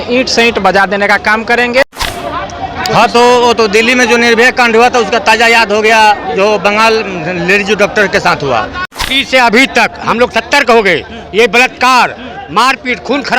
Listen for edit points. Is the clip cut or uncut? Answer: cut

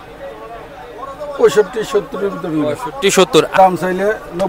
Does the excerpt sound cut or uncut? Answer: cut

